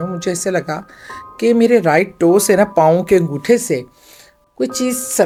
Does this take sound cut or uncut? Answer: uncut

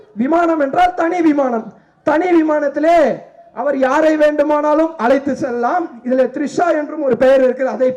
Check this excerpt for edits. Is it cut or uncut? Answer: uncut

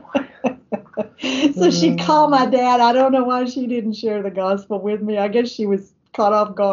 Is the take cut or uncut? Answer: uncut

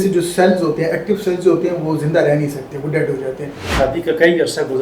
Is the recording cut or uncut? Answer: cut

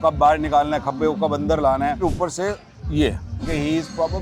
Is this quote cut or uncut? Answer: cut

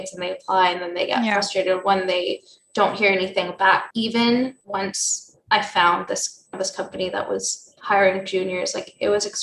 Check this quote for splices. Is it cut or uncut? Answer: cut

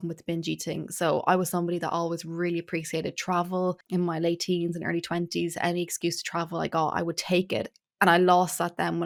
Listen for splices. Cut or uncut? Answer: uncut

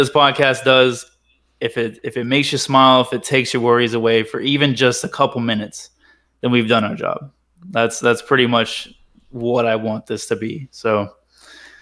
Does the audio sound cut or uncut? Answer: uncut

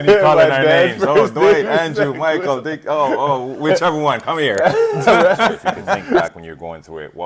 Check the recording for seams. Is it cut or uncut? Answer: cut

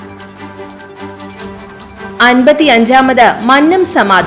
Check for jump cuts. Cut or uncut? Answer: cut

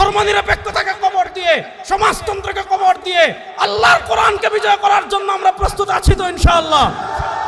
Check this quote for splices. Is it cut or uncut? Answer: uncut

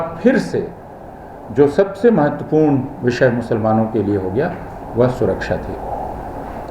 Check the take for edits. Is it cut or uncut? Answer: uncut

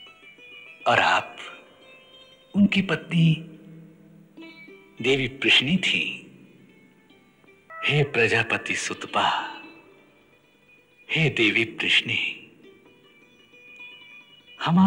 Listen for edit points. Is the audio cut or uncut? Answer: cut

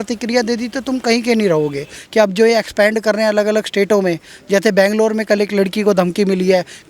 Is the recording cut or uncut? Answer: cut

